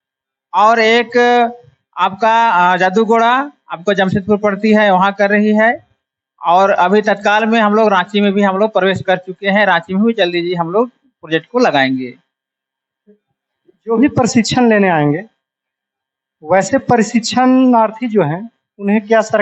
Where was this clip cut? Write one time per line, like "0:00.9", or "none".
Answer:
none